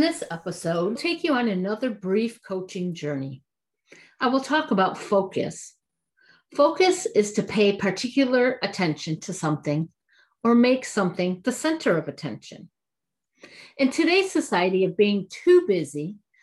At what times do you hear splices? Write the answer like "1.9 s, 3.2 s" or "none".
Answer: 1.0 s